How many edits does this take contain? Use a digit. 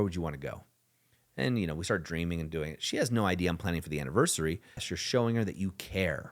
1